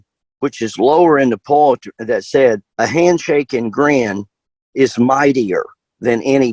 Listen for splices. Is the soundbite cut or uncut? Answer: cut